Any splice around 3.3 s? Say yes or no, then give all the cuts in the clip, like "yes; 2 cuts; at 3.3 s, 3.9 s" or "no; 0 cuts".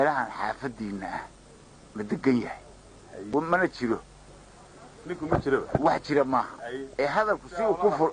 yes; 1 cut; at 3.3 s